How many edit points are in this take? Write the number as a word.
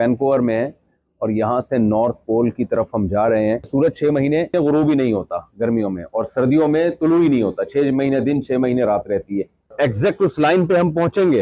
three